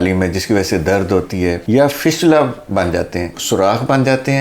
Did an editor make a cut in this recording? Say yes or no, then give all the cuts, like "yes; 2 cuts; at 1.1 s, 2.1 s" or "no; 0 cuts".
yes; 1 cut; at 3.3 s